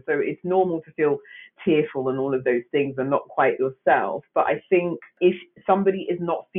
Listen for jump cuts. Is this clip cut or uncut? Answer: cut